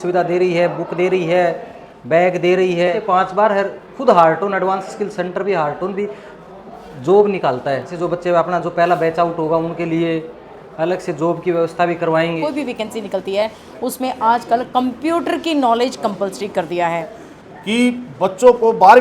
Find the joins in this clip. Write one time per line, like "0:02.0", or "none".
0:03.0
0:08.0
0:12.4
0:17.3